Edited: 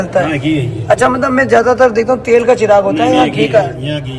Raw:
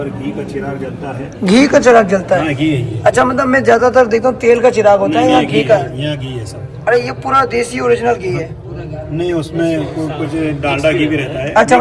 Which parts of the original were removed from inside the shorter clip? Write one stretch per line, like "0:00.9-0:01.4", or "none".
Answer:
none